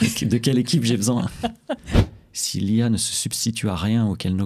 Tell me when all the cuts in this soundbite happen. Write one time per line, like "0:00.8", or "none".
0:02.0